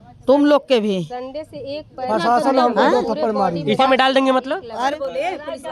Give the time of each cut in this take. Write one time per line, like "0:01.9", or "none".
0:04.7